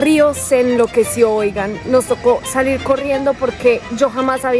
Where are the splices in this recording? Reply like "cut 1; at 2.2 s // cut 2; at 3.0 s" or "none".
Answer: none